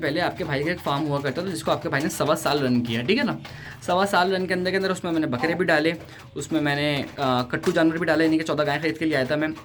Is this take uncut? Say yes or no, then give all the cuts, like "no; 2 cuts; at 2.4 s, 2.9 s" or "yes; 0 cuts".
yes; 0 cuts